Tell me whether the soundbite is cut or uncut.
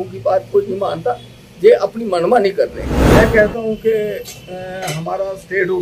cut